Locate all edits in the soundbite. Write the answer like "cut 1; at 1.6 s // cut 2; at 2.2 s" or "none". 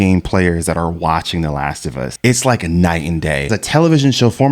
cut 1; at 2.1 s // cut 2; at 3.5 s